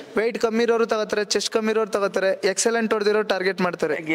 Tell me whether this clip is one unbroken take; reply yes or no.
yes